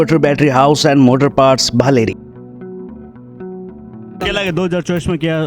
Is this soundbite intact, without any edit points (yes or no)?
no